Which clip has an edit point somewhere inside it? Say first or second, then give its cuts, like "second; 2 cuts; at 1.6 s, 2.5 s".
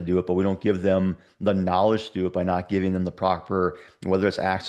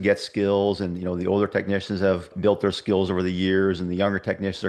second; 1 cut; at 2.3 s